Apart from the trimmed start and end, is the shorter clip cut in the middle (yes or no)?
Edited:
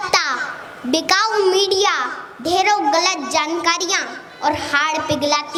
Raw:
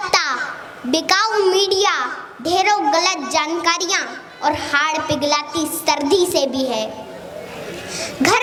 no